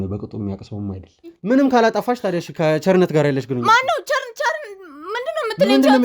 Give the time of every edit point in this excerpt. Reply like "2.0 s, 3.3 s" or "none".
1.3 s

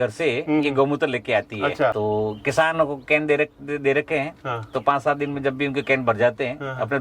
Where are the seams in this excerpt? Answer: 2.0 s

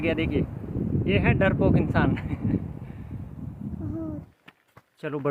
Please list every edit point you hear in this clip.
4.1 s

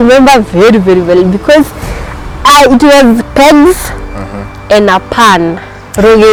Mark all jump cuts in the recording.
none

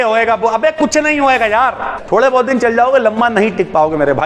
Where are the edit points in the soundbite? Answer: 1.9 s

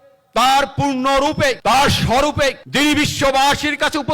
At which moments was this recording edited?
1.6 s, 2.6 s

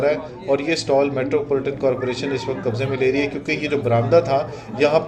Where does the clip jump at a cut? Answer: none

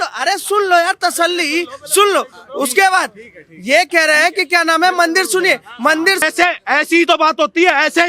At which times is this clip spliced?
6.2 s

